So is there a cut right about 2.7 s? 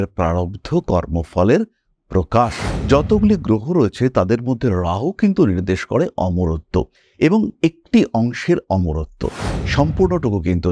yes; 1 cut; at 2.7 s

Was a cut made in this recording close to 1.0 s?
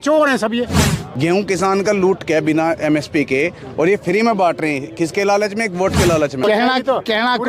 yes; 2 cuts; at 1.0 s, 6.4 s

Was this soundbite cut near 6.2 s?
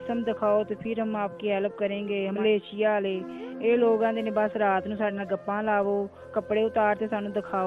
no; 1 cut; at 2.2 s

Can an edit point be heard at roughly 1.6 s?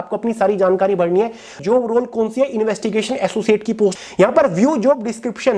yes; 2 cuts; at 1.6 s, 3.9 s

